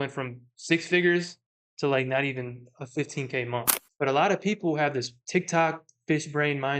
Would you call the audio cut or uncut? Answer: cut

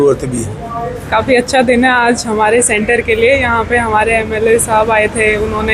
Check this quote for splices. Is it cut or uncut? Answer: cut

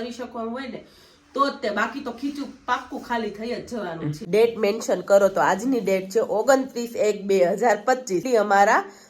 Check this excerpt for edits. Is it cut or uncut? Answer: cut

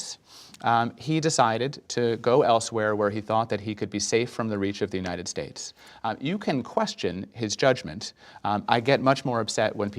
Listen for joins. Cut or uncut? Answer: uncut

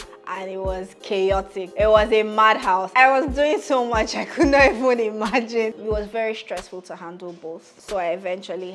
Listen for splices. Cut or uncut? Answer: cut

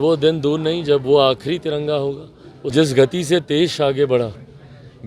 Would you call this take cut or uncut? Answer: cut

